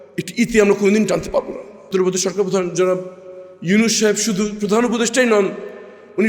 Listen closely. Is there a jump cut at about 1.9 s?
yes; 1 cut; at 1.9 s

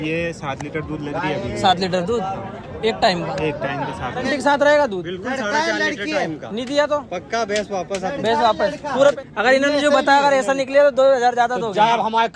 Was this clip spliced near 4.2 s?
yes; 2 cuts; at 4.2 s, 9.1 s

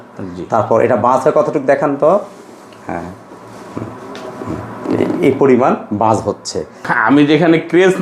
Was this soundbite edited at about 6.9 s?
yes; 1 cut; at 6.9 s

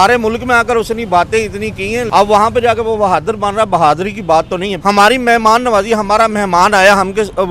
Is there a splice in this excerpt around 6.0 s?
no; 2 cuts; at 2.1 s, 4.7 s

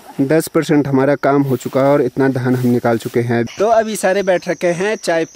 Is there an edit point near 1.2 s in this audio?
no; 1 cut; at 3.5 s

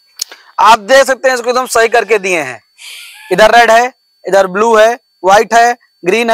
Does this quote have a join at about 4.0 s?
no; 0 cuts

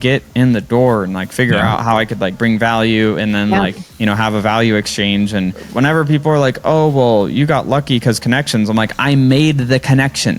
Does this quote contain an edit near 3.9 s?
yes; 2 cuts; at 3.9 s, 5.6 s

